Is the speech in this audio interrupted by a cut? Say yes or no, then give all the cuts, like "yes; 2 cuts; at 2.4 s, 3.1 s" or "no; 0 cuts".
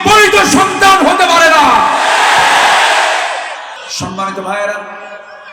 yes; 1 cut; at 3.8 s